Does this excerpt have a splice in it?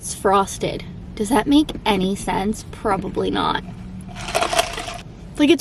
no; 0 cuts

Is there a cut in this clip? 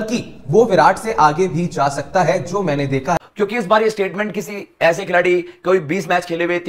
yes; 1 cut; at 3.2 s

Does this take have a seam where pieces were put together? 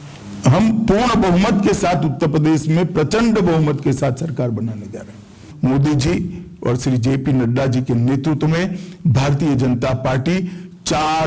yes; 1 cut; at 5.4 s

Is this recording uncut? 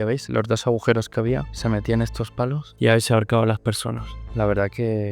no; 3 cuts; at 1.5 s, 2.7 s, 4.3 s

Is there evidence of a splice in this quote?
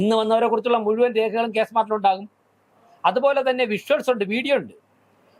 no; 0 cuts

